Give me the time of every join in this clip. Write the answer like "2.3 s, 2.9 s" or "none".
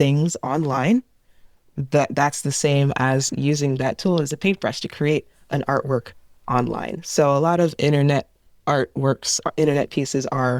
none

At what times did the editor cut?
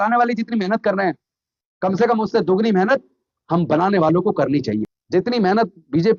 5.0 s

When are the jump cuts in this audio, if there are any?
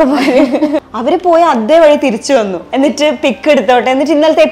0.8 s, 2.6 s

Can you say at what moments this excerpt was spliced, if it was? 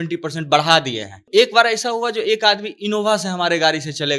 1.3 s

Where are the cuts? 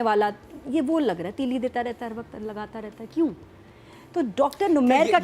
none

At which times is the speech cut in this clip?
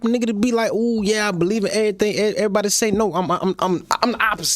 none

